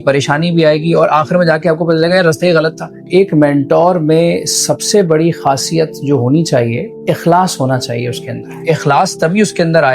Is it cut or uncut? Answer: cut